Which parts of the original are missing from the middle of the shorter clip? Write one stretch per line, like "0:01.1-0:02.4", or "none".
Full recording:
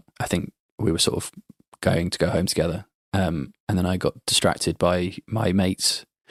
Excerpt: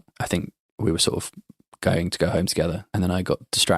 0:02.8-0:03.6